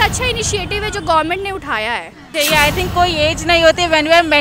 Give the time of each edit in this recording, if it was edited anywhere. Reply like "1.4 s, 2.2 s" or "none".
2.3 s